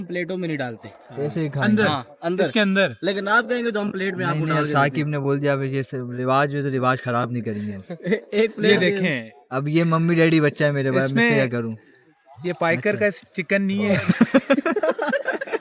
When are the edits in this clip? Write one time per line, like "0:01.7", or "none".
none